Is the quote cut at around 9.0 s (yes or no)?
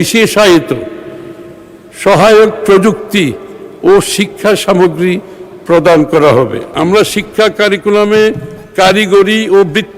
no